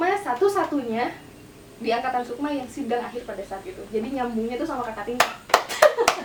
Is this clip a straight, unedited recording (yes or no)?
yes